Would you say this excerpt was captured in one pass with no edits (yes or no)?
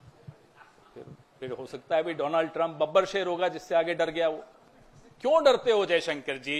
yes